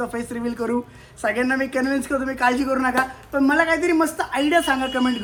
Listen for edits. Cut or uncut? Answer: uncut